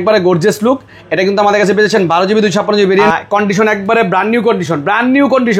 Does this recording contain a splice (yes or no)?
yes